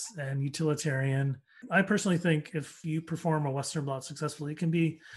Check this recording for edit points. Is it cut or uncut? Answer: cut